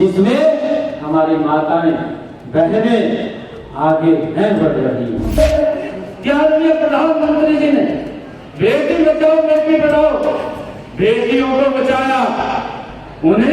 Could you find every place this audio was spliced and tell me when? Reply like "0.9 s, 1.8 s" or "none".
5.4 s